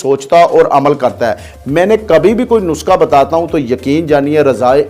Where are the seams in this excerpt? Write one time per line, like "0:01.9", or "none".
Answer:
none